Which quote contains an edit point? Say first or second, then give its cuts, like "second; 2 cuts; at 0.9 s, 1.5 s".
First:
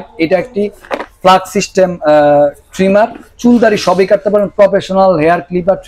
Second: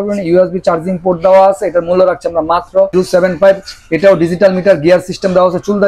second; 1 cut; at 2.9 s